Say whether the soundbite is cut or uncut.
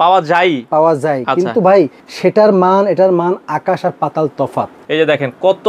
cut